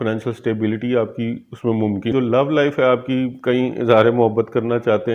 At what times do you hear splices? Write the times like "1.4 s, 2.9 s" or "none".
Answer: 2.1 s